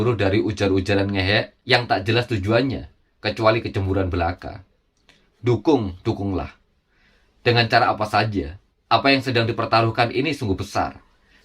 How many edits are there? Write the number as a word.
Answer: one